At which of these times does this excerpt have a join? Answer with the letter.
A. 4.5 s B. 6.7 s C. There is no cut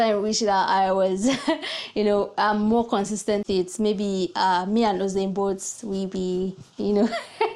C